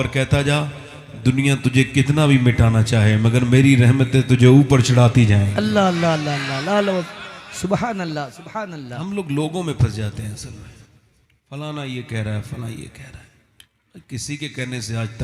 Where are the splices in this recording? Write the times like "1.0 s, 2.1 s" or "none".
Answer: none